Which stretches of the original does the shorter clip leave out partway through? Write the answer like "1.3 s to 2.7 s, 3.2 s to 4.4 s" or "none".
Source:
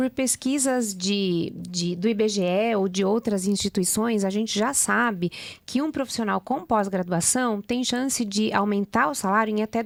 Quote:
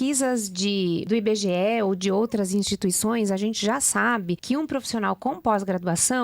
1.5 s to 2.0 s, 5.3 s to 5.7 s